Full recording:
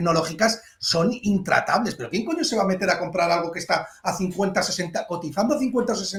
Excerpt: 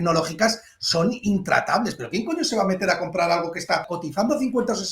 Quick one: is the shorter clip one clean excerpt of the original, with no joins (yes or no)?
no